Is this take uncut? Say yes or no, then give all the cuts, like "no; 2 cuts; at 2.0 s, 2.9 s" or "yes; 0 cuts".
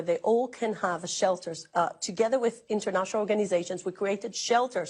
yes; 0 cuts